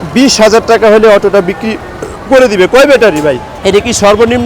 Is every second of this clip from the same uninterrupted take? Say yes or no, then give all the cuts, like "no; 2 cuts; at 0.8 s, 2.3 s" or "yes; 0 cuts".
no; 1 cut; at 3.5 s